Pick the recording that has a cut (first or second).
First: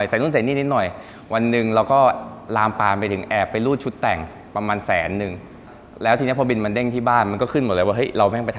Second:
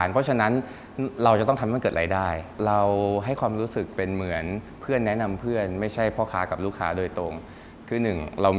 second